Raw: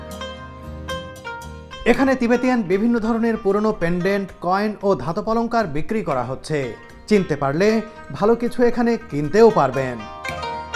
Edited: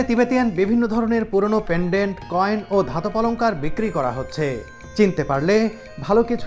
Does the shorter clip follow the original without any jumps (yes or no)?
yes